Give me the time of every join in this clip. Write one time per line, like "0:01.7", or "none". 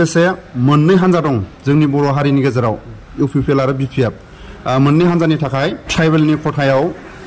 0:05.8